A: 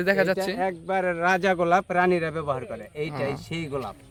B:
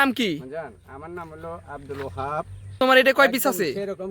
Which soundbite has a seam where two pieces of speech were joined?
B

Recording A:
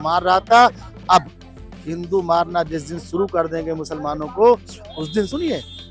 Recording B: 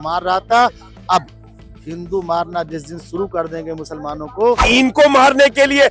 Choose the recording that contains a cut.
B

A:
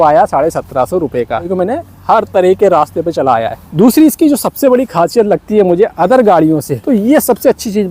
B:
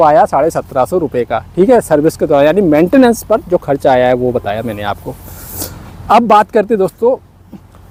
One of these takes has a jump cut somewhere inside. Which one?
A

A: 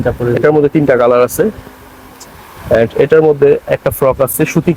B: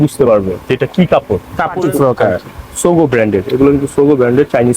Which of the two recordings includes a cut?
B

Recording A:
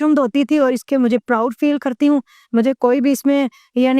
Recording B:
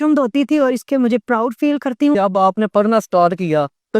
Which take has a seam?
B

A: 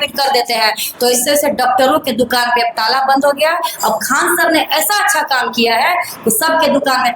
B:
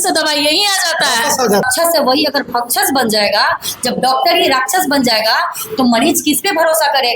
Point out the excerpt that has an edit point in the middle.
B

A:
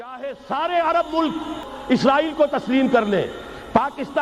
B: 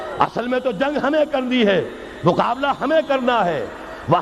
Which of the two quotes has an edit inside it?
A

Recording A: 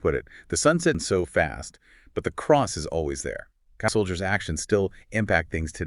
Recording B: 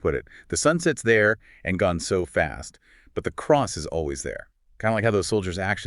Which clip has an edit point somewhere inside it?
A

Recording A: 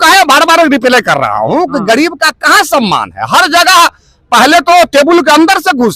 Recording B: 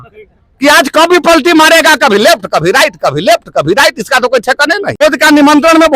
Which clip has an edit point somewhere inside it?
B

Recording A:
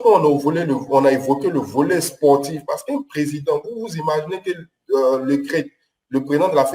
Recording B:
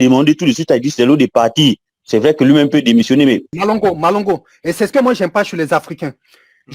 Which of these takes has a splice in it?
B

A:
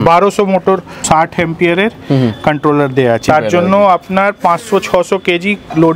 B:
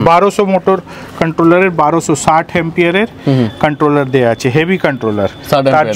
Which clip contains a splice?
A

